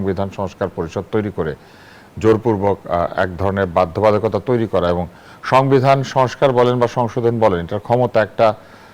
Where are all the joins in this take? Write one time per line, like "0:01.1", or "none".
none